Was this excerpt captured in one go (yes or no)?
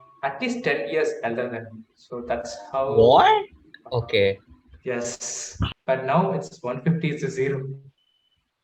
no